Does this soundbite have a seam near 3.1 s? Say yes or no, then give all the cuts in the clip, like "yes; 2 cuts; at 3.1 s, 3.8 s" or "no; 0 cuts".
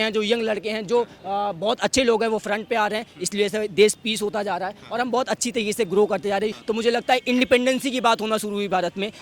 no; 1 cut; at 6.6 s